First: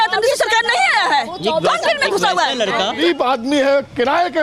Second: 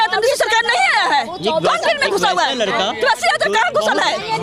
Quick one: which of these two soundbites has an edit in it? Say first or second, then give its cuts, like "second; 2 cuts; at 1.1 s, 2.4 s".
first; 1 cut; at 3.0 s